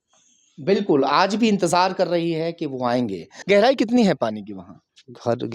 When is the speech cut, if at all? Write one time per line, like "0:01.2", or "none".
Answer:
0:03.3